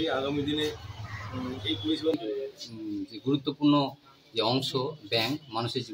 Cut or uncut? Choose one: cut